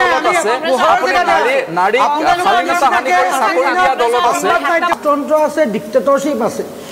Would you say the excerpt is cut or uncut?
cut